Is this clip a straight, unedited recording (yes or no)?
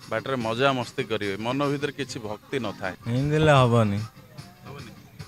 no